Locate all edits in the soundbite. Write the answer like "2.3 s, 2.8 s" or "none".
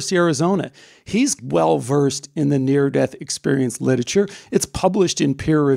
1.4 s